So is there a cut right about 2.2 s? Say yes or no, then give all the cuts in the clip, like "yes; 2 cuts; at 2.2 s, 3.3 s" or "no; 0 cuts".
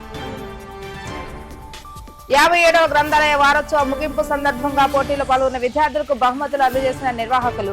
yes; 1 cut; at 2.2 s